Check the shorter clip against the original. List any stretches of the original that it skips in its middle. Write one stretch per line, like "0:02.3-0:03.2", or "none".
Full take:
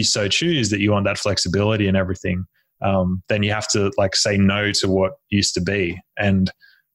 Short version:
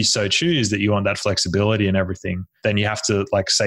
0:02.5-0:03.2